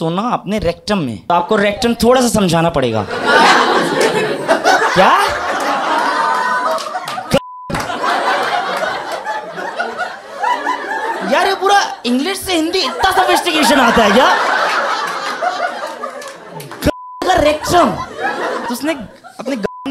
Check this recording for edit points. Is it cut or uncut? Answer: cut